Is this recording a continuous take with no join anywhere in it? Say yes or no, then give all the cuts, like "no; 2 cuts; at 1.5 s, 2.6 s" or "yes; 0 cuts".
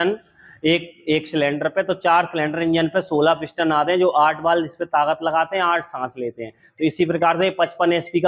yes; 0 cuts